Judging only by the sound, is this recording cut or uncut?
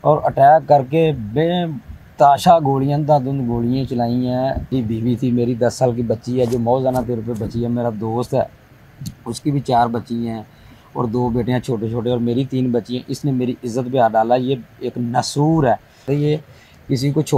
cut